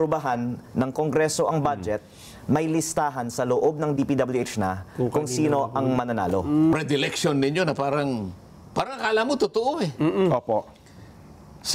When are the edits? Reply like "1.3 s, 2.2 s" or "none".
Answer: 6.7 s